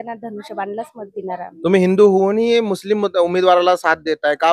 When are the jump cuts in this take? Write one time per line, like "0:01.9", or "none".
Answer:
none

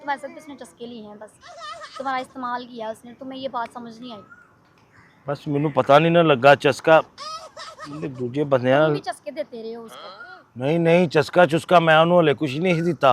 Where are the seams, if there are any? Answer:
none

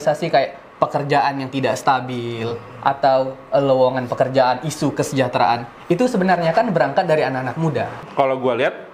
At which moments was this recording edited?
0:08.0

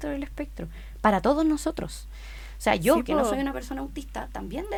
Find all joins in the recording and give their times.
none

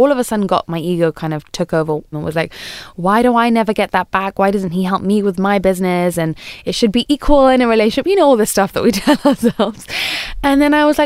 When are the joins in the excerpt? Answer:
0:02.1

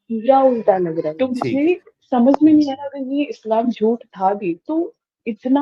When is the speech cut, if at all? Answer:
0:01.1

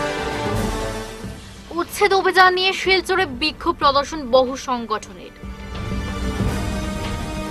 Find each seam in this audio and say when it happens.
0:01.1

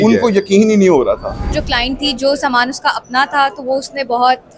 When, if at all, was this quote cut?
0:01.6

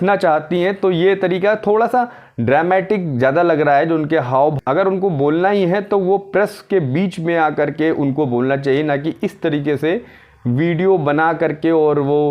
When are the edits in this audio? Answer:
0:04.6

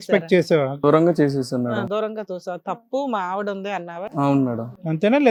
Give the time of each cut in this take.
none

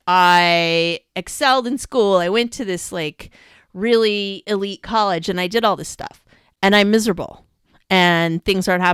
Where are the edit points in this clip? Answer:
none

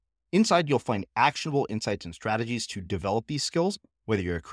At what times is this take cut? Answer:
none

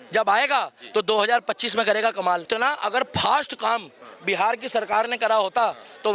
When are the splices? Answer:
0:02.5

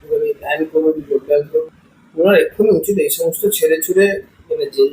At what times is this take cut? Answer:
0:01.6

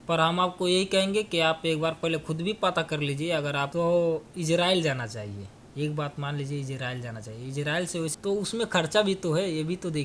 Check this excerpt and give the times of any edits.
0:03.7
0:07.7

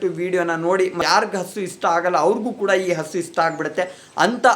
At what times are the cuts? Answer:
0:01.0

